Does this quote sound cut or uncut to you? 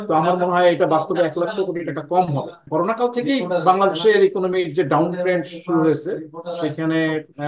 cut